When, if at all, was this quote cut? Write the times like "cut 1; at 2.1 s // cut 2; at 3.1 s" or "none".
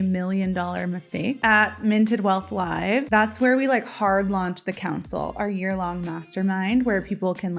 cut 1; at 1.4 s